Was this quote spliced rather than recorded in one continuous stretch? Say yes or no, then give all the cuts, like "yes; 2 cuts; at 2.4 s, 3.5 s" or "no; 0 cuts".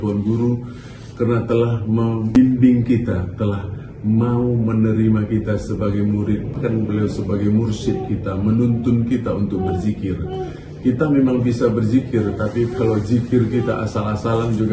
yes; 2 cuts; at 2.4 s, 6.6 s